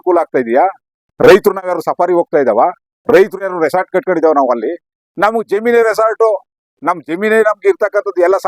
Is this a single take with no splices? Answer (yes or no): yes